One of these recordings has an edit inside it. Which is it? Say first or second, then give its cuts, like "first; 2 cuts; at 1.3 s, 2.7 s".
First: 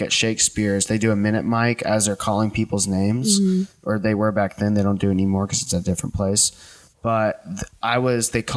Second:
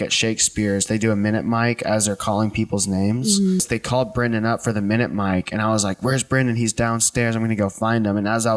second; 1 cut; at 3.6 s